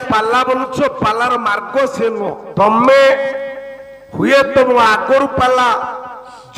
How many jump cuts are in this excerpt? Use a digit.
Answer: 1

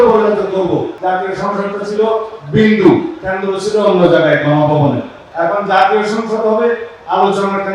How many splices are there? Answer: 2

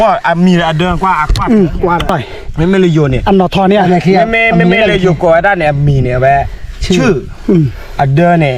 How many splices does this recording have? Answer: 1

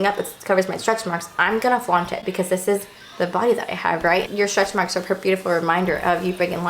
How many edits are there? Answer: 1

